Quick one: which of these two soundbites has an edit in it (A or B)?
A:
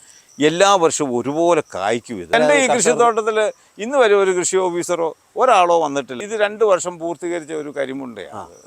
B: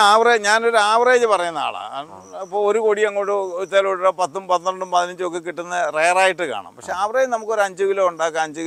A